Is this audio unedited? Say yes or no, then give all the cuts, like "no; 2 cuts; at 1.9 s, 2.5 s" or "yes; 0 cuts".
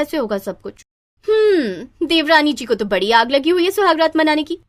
yes; 0 cuts